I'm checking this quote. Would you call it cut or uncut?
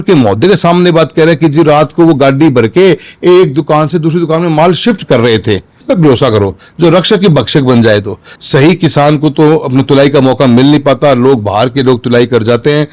cut